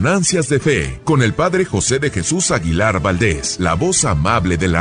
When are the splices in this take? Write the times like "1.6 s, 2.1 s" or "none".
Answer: 0.9 s, 3.5 s